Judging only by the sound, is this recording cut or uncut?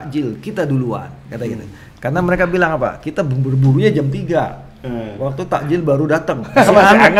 uncut